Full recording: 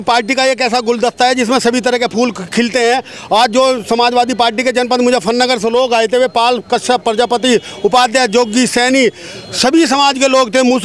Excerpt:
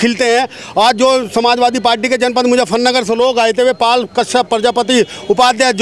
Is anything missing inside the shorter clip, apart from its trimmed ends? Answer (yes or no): no